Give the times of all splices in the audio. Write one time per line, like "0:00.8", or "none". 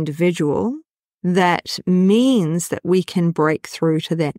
none